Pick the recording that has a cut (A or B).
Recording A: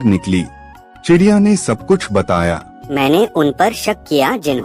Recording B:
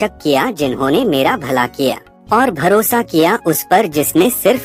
A